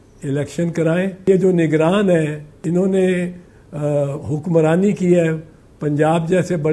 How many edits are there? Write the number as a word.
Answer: two